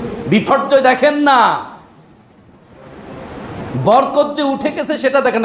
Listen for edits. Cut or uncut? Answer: uncut